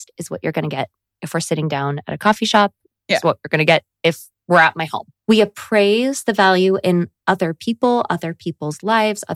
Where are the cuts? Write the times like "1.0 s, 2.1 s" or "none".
5.1 s